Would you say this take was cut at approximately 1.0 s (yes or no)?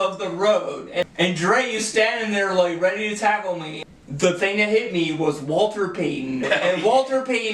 yes